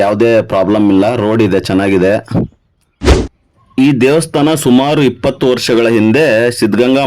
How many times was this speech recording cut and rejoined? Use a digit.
1